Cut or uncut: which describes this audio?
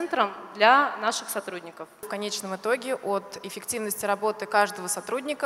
cut